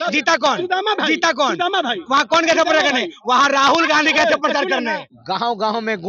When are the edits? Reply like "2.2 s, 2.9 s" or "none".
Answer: 5.1 s